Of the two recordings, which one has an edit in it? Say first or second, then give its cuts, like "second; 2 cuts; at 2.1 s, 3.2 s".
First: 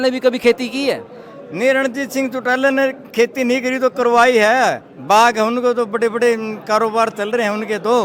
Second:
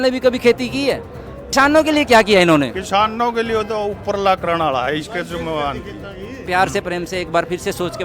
second; 2 cuts; at 1.4 s, 6.4 s